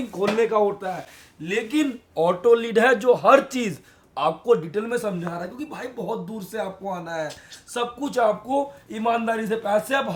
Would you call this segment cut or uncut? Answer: uncut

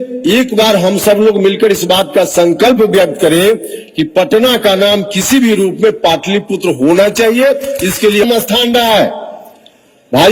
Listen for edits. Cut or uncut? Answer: cut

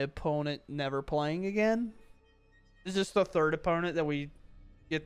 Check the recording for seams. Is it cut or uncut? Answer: uncut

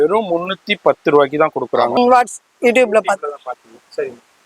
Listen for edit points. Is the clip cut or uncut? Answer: cut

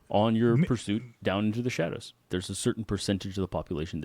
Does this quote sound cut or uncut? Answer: cut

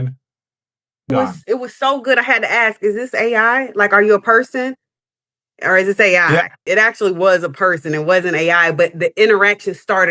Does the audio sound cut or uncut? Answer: cut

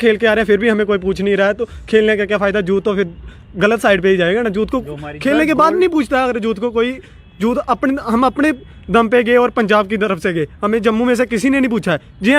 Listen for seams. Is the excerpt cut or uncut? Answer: uncut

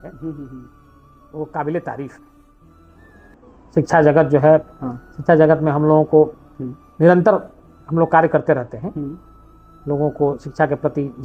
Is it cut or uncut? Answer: uncut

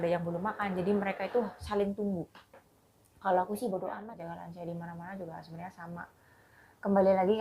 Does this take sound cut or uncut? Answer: cut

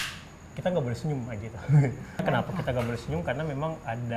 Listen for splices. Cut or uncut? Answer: cut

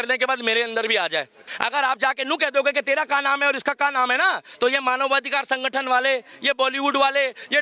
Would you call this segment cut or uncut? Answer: cut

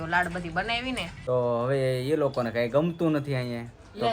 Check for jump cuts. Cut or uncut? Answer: cut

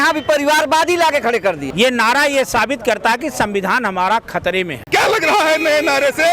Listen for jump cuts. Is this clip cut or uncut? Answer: cut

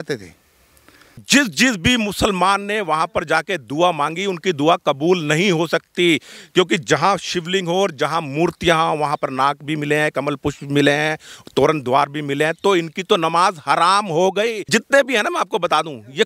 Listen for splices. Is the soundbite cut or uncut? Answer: cut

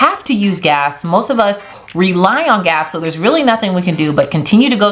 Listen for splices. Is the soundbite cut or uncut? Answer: uncut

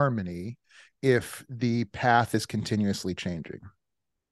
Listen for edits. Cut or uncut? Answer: uncut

